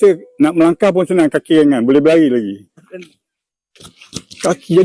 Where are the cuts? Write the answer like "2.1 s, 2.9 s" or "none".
none